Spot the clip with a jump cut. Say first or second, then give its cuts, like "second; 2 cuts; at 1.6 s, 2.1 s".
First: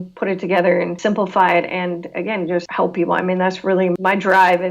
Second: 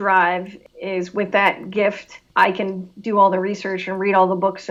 first; 3 cuts; at 1.0 s, 2.7 s, 4.0 s